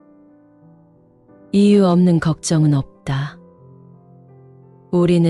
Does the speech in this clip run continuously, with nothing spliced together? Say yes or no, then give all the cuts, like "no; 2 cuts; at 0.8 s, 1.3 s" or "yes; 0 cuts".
no; 1 cut; at 1.1 s